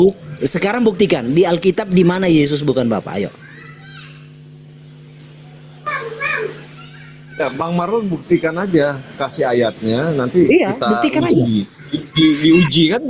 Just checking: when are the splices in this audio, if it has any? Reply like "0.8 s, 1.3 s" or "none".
none